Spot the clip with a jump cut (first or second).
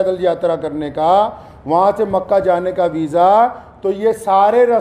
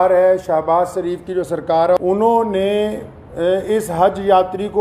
second